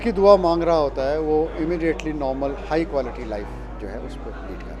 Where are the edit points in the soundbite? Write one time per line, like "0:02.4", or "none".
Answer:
none